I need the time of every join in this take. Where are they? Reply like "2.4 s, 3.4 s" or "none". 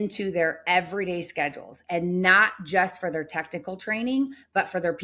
none